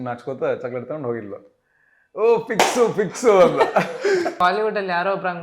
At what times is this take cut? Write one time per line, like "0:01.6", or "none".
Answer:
0:04.4